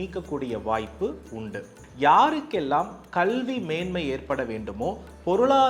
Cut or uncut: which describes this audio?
cut